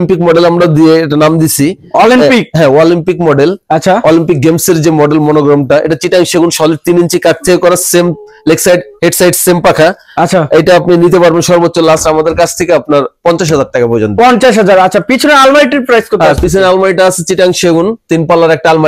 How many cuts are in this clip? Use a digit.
0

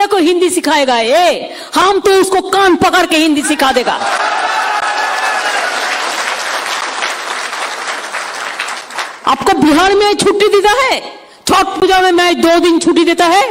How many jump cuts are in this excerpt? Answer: 0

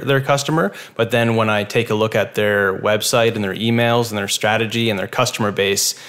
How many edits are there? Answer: 0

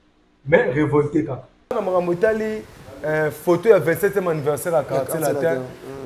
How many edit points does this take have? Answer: 1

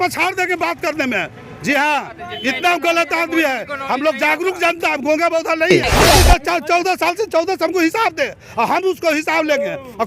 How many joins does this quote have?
1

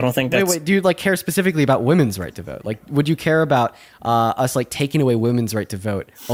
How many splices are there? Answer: 0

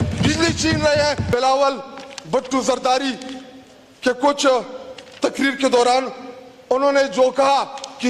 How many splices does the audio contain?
1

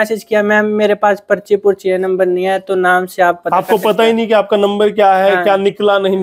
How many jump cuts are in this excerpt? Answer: 0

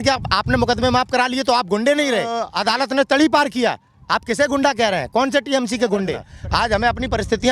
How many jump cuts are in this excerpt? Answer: 2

